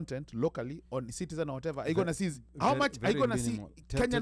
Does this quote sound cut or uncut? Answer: uncut